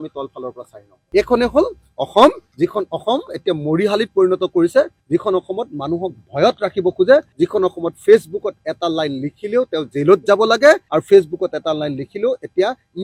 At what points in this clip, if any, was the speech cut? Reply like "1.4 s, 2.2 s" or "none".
none